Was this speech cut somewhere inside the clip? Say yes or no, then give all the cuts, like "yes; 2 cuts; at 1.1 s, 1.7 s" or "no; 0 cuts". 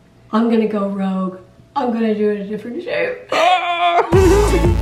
no; 0 cuts